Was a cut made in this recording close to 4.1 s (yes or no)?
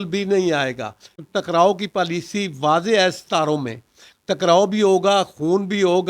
no